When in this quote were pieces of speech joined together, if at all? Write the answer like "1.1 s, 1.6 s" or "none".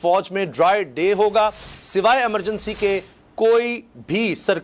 none